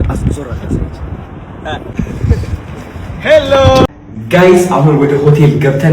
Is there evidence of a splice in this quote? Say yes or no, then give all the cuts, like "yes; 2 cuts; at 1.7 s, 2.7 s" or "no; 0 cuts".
yes; 1 cut; at 3.9 s